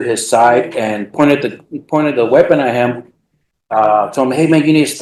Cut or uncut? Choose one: uncut